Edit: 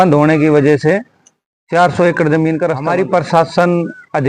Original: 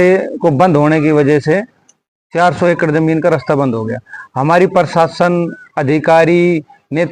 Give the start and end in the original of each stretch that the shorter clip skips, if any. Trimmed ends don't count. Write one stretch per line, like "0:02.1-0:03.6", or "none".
0:03.4-0:04.4